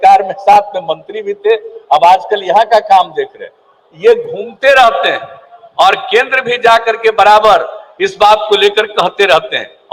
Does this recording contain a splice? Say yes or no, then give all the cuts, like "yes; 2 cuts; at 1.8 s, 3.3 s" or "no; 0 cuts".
no; 0 cuts